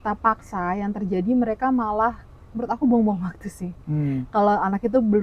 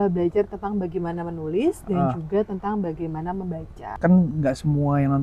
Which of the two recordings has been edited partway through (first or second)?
second